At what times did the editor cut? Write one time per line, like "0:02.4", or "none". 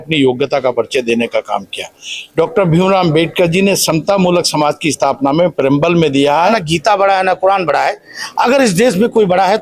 0:06.6